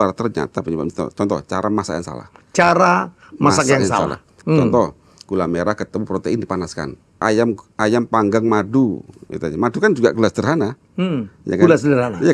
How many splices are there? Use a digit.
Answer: 2